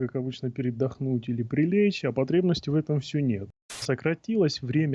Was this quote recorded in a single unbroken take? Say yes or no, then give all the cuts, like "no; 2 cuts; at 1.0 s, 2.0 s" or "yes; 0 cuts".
no; 1 cut; at 3.8 s